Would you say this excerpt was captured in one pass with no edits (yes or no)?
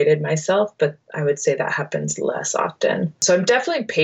yes